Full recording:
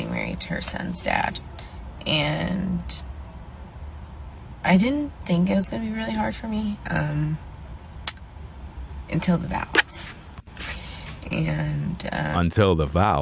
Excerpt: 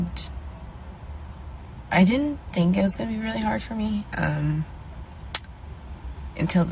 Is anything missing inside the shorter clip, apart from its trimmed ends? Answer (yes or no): no